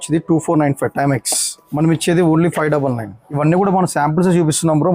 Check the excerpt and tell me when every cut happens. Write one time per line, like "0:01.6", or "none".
0:01.6
0:03.3